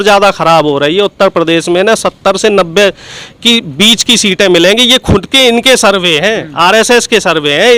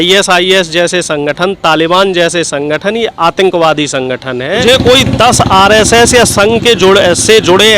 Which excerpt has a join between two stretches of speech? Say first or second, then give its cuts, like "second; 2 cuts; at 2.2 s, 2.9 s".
second; 1 cut; at 4.6 s